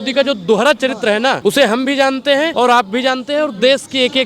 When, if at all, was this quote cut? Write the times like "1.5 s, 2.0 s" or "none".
1.4 s, 2.5 s